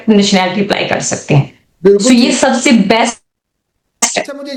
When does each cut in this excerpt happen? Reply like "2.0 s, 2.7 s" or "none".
none